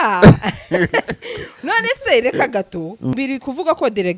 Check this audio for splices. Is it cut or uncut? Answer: cut